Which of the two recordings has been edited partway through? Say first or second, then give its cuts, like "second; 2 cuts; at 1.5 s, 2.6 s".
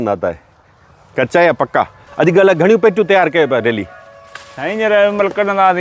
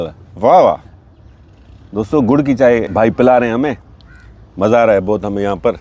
first; 1 cut; at 2.0 s